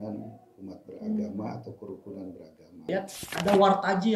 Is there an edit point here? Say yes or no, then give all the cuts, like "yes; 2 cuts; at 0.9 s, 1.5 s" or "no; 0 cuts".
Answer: yes; 1 cut; at 2.9 s